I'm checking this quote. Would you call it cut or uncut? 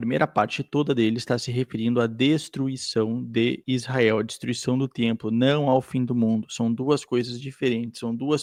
uncut